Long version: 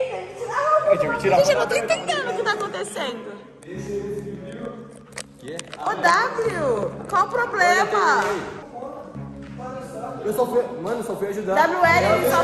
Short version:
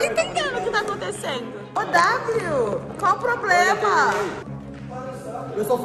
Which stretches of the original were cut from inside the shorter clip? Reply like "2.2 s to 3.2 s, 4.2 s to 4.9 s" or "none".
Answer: 3.4 s to 5.7 s, 8.6 s to 9.2 s